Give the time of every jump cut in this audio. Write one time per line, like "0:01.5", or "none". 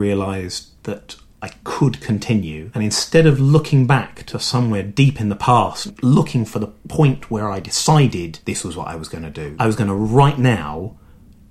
0:02.6
0:05.9
0:08.4
0:09.5